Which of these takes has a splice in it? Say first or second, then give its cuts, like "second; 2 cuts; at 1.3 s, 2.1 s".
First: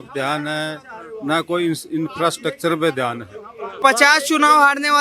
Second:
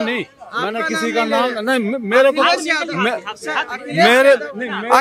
first; 1 cut; at 3.8 s